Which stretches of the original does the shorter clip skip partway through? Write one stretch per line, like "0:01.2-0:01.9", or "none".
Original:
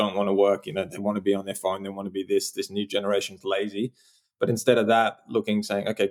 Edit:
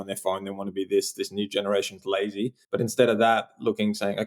0:04.0-0:04.3